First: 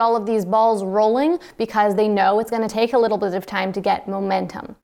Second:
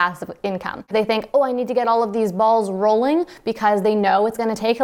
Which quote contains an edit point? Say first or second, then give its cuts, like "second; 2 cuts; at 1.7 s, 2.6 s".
second; 1 cut; at 0.9 s